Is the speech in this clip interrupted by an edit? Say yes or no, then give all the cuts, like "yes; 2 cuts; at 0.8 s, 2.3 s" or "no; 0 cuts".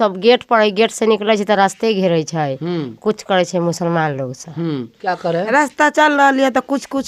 yes; 1 cut; at 4.9 s